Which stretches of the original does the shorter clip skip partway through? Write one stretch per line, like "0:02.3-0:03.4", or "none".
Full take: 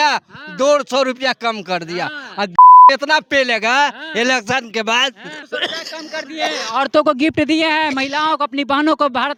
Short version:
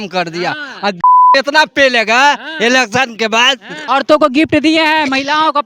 0:05.3-0:06.6

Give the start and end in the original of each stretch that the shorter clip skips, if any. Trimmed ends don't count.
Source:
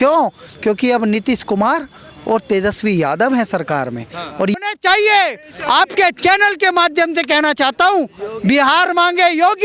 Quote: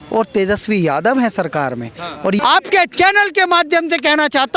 0:04.6-0:05.7

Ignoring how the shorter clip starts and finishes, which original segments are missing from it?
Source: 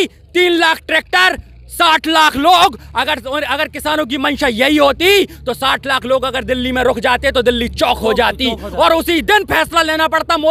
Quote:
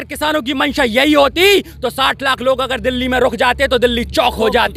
none

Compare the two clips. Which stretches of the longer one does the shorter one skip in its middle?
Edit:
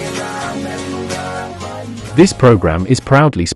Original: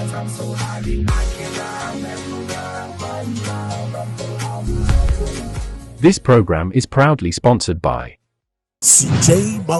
0:03.3-0:05.8

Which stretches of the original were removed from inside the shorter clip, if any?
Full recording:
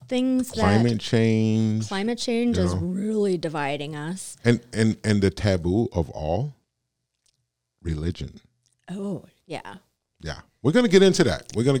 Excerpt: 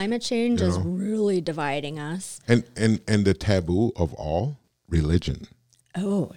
0:06.7-0:07.6

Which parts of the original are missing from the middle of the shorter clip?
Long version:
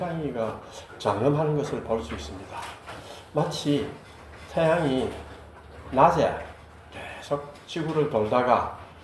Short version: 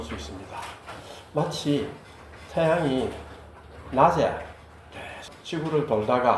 0:07.2-0:07.5

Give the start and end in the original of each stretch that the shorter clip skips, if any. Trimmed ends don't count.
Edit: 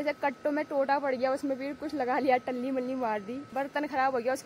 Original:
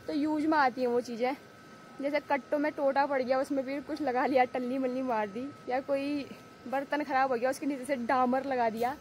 0:05.5-0:06.6

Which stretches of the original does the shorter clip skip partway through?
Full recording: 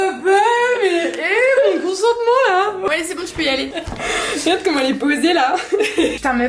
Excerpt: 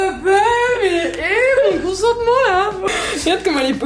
0:02.9-0:04.1

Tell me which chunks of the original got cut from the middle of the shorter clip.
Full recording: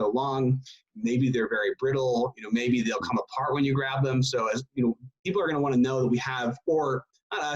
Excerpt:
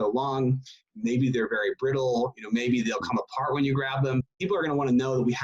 0:04.3-0:05.1

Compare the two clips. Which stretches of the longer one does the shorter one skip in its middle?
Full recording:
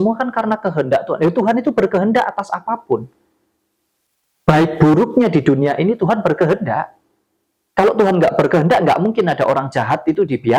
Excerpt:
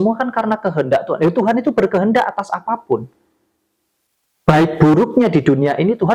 none

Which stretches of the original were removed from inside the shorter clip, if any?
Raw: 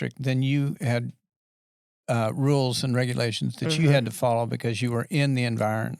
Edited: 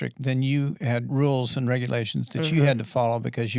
0:01.1-0:02.3

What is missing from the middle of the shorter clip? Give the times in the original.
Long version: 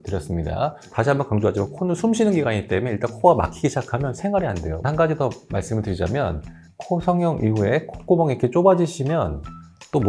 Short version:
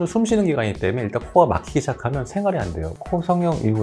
0:04.7-0:06.6

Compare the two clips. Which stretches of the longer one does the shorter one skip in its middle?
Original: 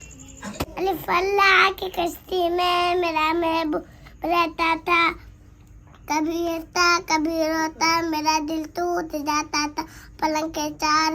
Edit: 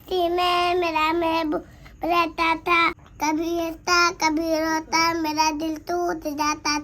0:05.3-0:05.9

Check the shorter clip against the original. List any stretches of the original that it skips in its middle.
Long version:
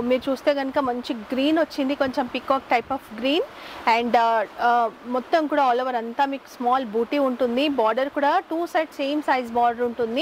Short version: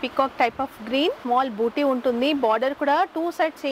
0:03.5-0:06.5

